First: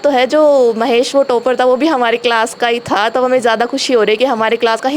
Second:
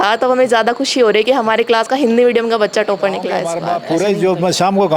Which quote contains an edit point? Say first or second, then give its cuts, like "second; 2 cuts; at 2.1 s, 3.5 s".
second; 1 cut; at 3.5 s